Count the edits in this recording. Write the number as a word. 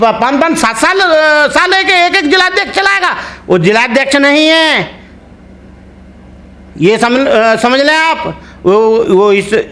zero